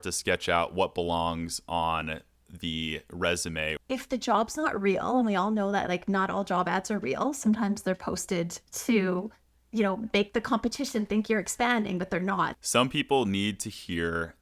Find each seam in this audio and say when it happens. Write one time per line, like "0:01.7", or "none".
0:03.8
0:12.5